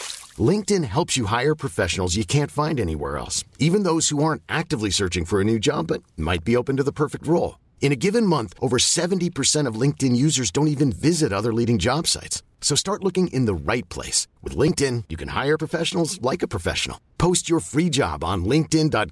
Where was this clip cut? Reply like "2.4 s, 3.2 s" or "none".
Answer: none